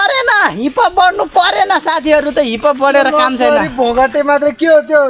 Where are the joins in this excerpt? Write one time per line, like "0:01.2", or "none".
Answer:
none